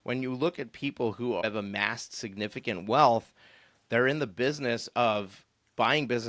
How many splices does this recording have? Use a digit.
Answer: 1